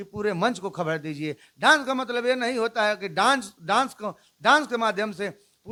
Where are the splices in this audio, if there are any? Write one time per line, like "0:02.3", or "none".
none